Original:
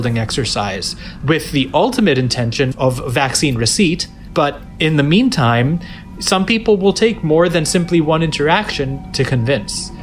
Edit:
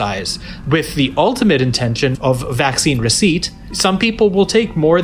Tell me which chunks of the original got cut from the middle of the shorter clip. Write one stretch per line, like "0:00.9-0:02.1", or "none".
0:04.1-0:06.0